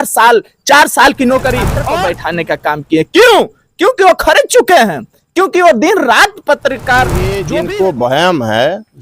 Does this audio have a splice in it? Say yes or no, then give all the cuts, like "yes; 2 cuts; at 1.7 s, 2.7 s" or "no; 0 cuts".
yes; 2 cuts; at 1.8 s, 7.4 s